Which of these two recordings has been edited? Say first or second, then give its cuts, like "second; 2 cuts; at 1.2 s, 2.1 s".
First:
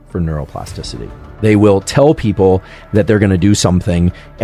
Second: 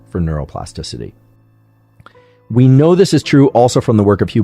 first; 1 cut; at 1.3 s